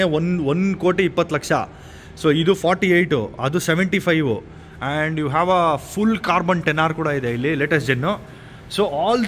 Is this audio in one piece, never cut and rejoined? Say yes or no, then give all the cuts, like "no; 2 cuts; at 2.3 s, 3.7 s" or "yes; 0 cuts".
yes; 0 cuts